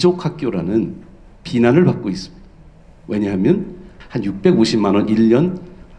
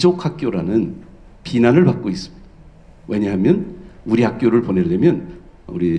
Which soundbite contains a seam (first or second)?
first